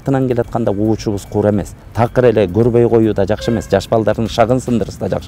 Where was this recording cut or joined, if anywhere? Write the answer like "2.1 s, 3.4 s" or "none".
none